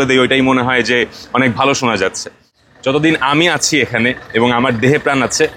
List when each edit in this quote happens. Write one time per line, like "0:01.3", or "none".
0:02.5